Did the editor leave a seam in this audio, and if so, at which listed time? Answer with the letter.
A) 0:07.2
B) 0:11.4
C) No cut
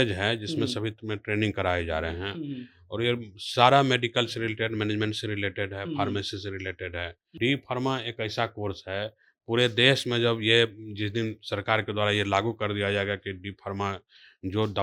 A